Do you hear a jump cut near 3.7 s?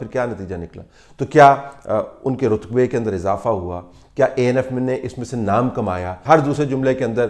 no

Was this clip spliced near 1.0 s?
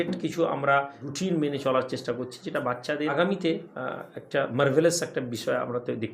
yes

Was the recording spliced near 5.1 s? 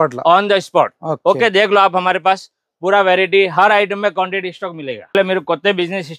yes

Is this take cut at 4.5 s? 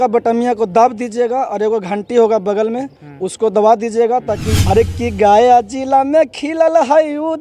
yes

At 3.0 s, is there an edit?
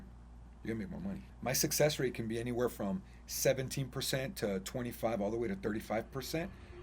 no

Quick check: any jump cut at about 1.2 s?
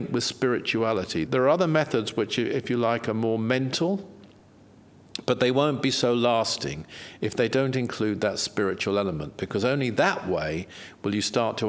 yes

